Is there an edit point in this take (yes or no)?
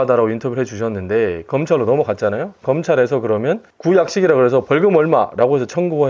no